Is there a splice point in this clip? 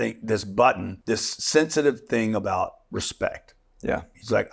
yes; 1 cut; at 0.9 s

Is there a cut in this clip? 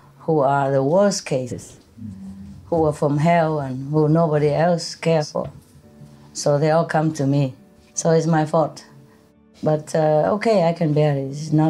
no; 0 cuts

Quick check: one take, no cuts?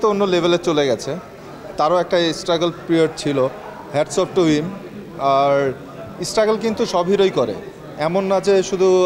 yes; 0 cuts

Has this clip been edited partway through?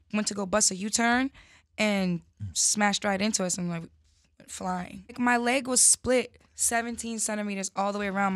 yes; 1 cut; at 5.1 s

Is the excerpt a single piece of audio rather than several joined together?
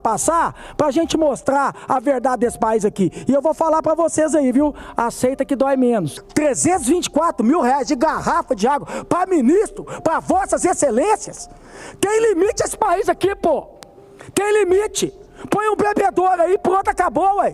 no; 1 cut; at 6.2 s

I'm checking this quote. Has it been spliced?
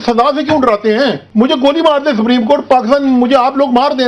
yes; 1 cut; at 1.2 s

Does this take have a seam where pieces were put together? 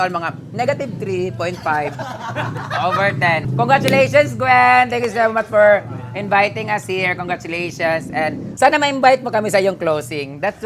yes; 2 cuts; at 3.5 s, 8.4 s

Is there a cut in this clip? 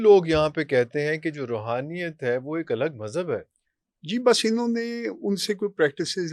no; 0 cuts

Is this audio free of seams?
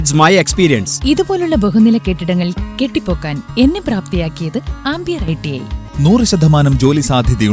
no; 1 cut; at 5.8 s

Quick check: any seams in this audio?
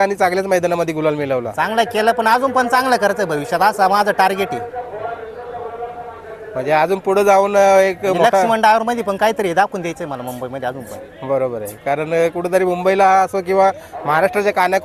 no; 0 cuts

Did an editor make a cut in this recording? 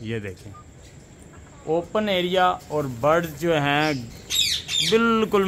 no; 0 cuts

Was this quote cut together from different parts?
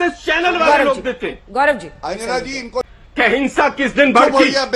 no; 0 cuts

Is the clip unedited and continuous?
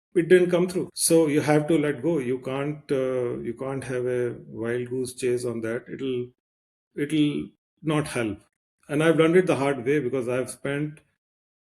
no; 2 cuts; at 0.9 s, 8.5 s

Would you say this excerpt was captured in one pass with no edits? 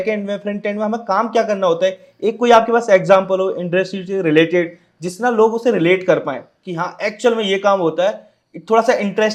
yes; 0 cuts

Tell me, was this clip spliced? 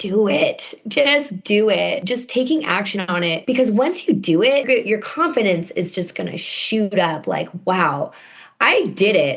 yes; 3 cuts; at 2.0 s, 3.4 s, 4.7 s

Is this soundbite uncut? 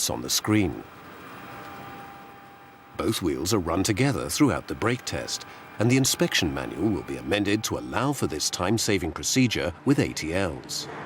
yes; 0 cuts

